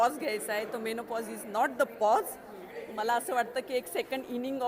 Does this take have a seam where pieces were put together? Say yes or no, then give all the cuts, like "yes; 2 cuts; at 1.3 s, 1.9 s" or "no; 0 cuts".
no; 0 cuts